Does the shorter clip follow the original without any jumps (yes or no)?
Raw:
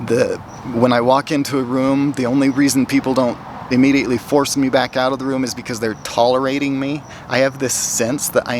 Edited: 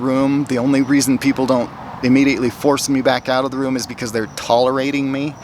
yes